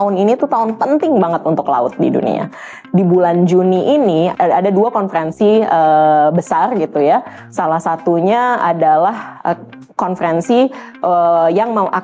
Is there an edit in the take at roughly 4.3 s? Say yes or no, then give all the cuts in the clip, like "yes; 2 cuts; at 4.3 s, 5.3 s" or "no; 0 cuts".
yes; 2 cuts; at 2.7 s, 4.3 s